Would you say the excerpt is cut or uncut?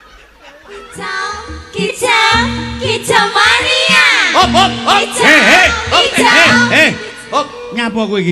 cut